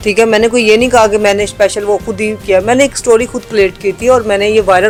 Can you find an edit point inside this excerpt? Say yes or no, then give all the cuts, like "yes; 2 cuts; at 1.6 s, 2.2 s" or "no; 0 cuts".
no; 0 cuts